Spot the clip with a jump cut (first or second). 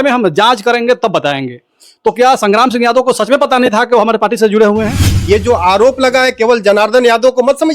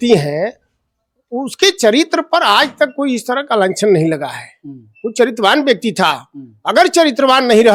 first